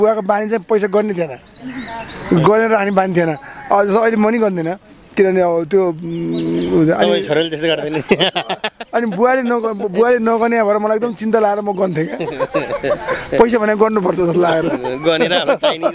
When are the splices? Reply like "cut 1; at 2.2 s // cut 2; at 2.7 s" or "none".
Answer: none